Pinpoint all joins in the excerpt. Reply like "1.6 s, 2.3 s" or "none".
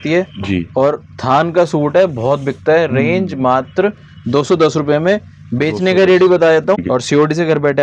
6.8 s

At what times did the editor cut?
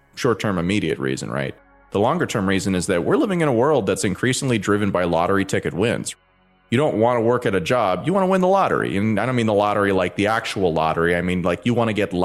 6.3 s

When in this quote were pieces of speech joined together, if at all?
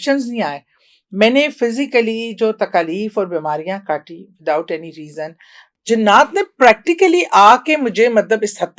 5.7 s

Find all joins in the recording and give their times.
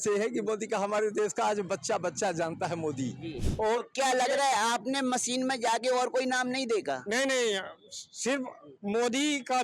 3.4 s

